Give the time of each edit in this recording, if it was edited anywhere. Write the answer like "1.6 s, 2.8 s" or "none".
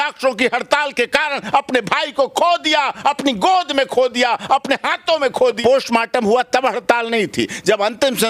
5.6 s

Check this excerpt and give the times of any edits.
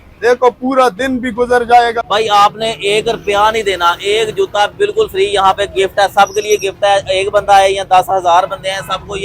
2.0 s

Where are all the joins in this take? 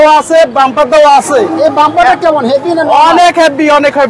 none

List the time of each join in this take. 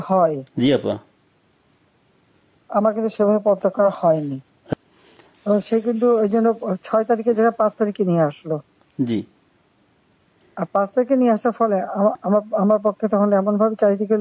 4.6 s

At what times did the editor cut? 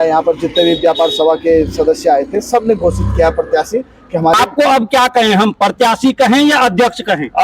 4.4 s

